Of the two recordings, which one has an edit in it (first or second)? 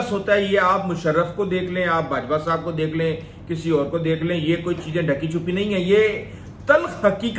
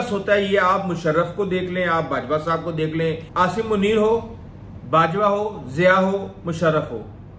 second